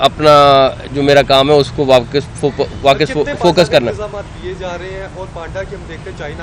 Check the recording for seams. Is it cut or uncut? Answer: uncut